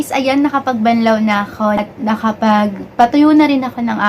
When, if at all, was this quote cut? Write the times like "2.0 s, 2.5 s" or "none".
1.8 s